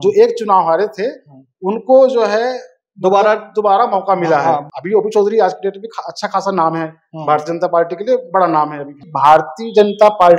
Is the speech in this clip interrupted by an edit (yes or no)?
yes